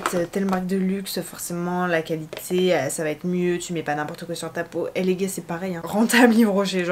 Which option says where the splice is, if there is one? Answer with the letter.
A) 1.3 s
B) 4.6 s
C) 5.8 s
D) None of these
C